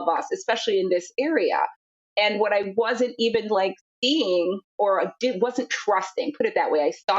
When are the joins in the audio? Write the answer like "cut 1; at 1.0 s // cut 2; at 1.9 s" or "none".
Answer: cut 1; at 4.6 s